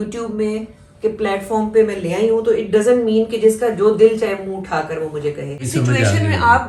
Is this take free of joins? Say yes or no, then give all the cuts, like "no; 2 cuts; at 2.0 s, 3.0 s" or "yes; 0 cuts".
no; 1 cut; at 5.6 s